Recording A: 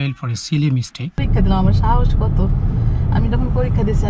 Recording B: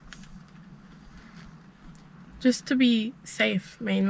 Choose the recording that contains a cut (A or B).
A